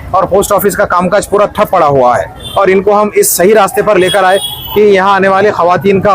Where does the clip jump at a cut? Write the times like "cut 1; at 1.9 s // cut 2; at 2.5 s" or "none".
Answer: cut 1; at 2.4 s